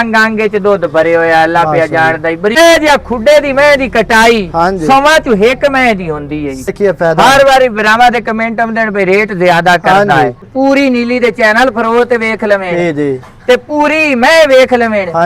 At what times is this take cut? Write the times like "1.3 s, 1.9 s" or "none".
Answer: 2.6 s, 6.7 s, 10.5 s